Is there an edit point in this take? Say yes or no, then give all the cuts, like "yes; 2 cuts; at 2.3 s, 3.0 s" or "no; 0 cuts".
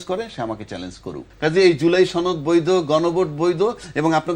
yes; 1 cut; at 1.2 s